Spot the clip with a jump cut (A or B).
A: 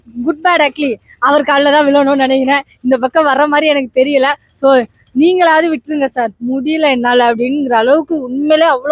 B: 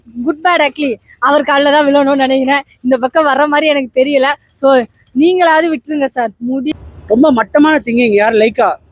B